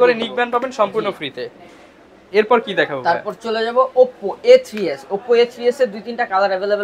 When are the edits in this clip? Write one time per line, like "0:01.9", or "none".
none